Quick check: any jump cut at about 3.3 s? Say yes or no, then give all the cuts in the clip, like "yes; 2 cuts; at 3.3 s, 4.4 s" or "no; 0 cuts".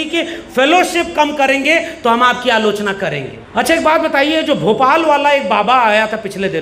yes; 1 cut; at 3.3 s